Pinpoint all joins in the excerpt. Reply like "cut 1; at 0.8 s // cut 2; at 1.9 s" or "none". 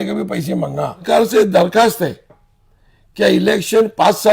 cut 1; at 1.0 s

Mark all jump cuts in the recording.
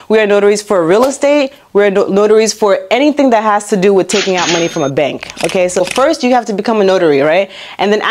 cut 1; at 5.8 s

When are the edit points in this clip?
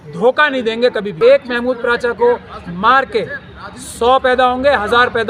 cut 1; at 1.2 s

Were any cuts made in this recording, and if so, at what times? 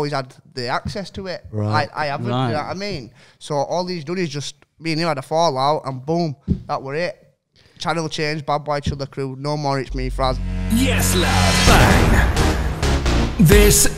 cut 1; at 10.4 s

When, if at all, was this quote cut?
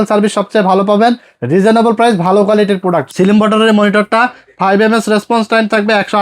cut 1; at 3.1 s

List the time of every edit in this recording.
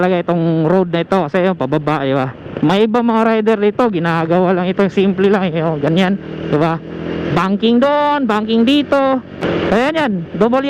cut 1; at 9.4 s

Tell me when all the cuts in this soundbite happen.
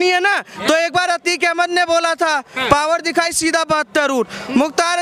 none

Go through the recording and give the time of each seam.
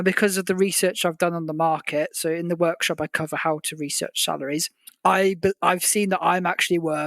cut 1; at 4.8 s

